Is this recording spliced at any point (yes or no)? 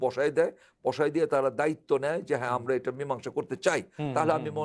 no